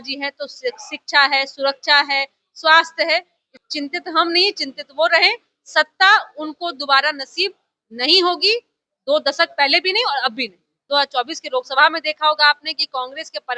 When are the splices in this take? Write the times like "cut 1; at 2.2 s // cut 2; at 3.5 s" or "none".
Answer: cut 1; at 3.6 s // cut 2; at 10.8 s